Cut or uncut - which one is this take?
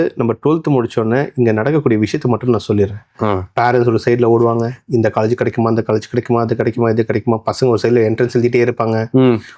uncut